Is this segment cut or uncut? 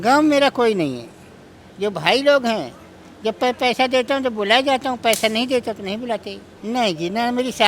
cut